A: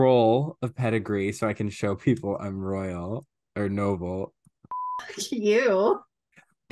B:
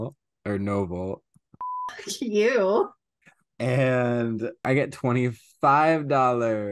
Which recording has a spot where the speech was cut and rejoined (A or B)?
B